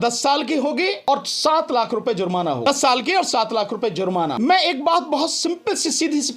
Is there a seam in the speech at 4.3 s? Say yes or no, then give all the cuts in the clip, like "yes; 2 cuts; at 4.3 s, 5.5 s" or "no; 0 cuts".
yes; 3 cuts; at 1.0 s, 2.7 s, 4.3 s